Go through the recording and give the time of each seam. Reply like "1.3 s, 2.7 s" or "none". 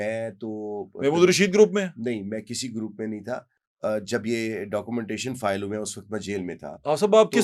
none